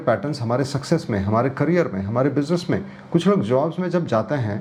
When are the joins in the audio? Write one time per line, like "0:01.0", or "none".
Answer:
none